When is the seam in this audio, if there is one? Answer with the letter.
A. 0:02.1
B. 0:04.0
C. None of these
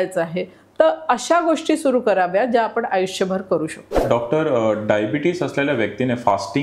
B